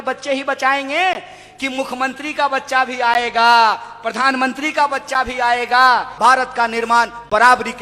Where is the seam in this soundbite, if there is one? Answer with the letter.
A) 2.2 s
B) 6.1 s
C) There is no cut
B